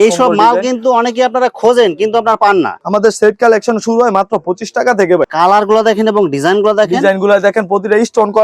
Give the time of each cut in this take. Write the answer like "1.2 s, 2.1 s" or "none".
2.8 s, 5.3 s